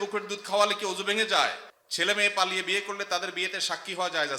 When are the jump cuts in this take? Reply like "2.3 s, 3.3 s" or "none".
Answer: 1.7 s